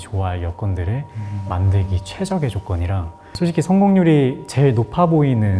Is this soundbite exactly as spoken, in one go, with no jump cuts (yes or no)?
no